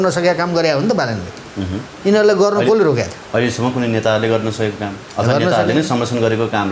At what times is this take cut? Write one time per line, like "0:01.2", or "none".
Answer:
none